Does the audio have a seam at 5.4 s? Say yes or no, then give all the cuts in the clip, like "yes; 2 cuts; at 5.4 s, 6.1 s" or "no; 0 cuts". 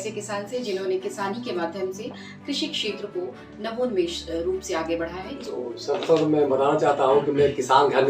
yes; 1 cut; at 5.4 s